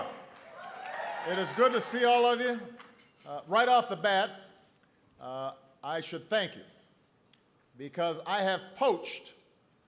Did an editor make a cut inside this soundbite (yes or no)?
no